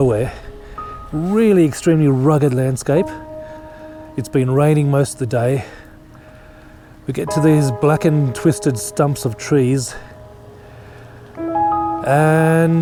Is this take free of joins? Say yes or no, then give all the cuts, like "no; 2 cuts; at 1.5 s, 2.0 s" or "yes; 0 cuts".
yes; 0 cuts